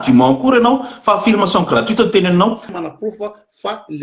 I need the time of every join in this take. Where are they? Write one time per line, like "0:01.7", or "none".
0:02.7